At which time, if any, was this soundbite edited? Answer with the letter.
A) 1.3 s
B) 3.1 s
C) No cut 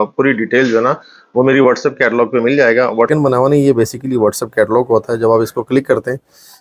B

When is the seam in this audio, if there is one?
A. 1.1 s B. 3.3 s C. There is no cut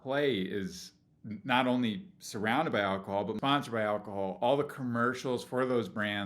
B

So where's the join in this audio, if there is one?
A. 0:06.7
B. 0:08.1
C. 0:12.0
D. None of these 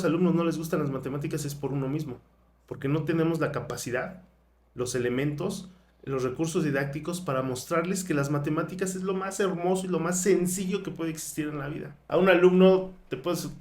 C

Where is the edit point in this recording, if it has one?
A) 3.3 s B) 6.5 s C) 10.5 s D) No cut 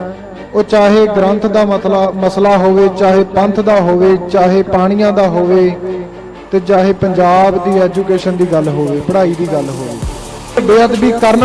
C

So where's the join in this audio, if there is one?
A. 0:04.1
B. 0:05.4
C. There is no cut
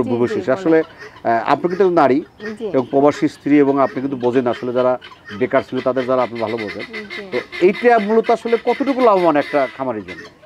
C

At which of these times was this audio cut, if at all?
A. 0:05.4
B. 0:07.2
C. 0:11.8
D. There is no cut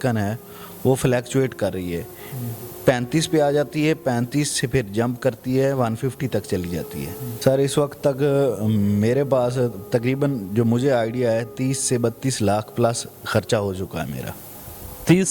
B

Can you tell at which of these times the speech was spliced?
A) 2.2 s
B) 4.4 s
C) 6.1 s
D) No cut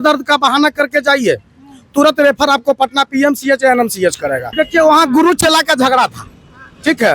B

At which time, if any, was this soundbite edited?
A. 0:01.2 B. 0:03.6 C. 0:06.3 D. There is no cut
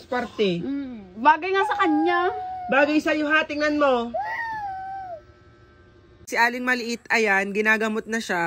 C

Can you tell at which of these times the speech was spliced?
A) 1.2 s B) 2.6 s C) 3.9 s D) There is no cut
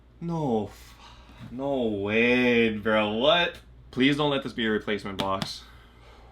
C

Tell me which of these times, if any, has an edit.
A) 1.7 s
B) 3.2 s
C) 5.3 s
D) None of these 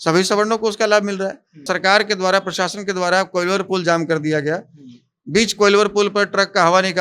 A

